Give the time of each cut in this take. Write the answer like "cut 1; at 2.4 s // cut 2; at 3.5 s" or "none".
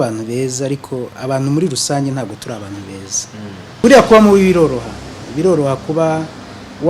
cut 1; at 3.6 s